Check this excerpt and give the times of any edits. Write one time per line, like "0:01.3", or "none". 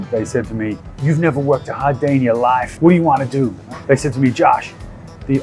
0:00.9
0:02.7
0:03.6